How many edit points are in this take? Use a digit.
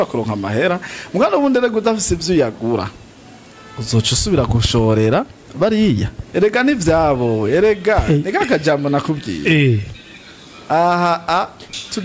1